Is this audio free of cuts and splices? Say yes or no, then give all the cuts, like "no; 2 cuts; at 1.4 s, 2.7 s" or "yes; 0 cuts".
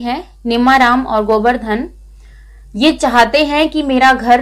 yes; 0 cuts